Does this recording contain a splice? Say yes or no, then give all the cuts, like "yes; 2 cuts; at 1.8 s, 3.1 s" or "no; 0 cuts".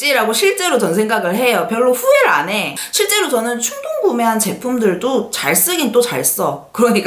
no; 0 cuts